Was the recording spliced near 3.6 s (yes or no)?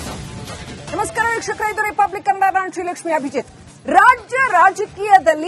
no